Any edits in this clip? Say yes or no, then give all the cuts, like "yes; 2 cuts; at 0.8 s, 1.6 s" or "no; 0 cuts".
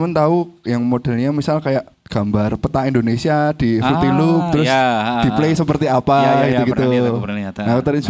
no; 0 cuts